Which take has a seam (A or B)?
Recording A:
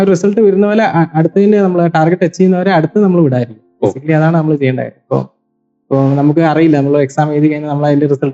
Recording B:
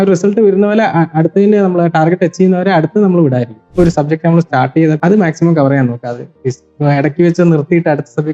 B